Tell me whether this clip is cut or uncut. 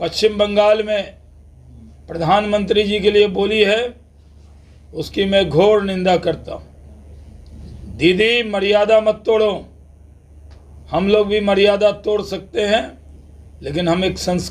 uncut